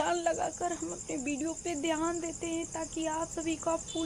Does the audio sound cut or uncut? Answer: uncut